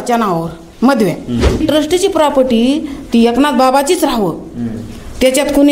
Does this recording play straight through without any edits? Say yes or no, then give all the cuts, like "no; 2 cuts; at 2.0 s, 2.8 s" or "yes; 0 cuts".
no; 1 cut; at 1.6 s